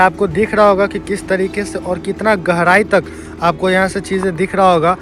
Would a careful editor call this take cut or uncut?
uncut